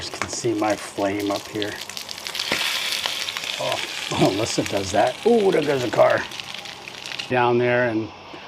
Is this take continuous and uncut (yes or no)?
no